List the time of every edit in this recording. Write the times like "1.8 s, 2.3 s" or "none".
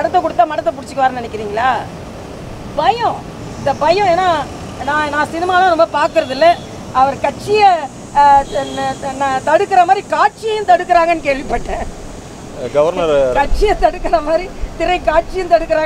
none